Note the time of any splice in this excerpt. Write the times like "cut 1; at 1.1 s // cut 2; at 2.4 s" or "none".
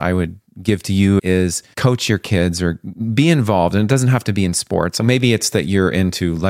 cut 1; at 1.2 s // cut 2; at 5.0 s